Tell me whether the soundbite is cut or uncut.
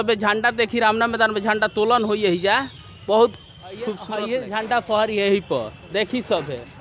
cut